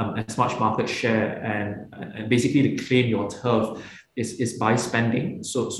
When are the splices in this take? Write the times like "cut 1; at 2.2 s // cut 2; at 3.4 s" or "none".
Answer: none